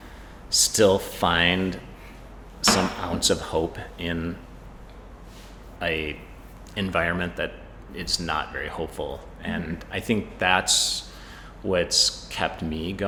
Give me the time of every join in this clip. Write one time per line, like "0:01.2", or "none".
none